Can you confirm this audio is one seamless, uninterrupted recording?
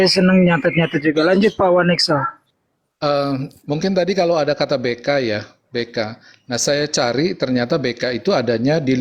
yes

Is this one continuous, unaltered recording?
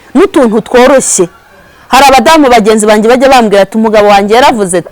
yes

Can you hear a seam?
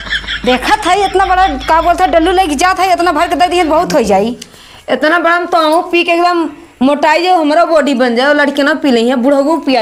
no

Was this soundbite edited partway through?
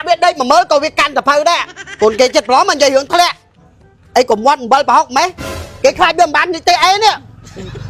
no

